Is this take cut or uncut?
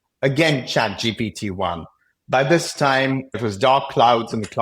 cut